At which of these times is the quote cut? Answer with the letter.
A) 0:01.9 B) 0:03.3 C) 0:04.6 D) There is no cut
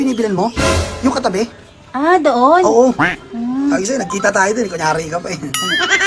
D